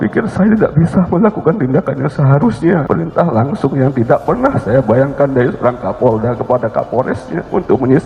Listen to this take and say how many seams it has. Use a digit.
1